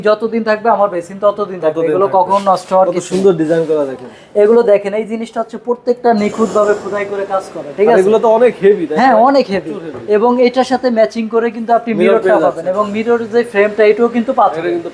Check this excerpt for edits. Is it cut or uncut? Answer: uncut